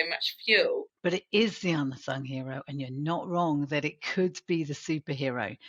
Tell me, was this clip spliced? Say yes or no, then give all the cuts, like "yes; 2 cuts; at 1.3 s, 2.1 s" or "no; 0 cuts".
yes; 1 cut; at 0.9 s